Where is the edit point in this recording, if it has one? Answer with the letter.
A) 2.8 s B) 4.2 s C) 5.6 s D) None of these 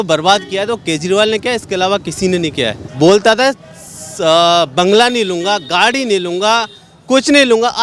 A